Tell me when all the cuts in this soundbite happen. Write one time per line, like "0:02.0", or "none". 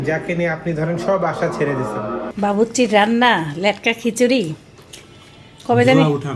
0:02.3